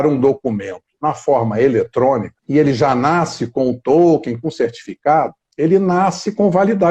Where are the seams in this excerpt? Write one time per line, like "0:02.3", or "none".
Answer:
0:02.3